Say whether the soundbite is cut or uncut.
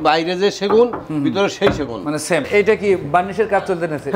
cut